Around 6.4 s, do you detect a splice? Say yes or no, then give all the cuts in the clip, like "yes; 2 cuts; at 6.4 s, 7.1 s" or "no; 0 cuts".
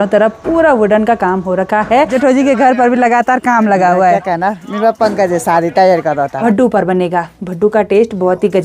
yes; 2 cuts; at 2.1 s, 6.4 s